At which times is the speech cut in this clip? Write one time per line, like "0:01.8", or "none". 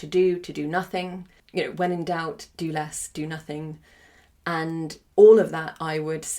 0:01.4
0:05.0